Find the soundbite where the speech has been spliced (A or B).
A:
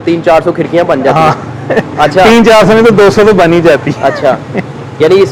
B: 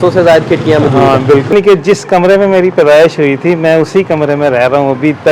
B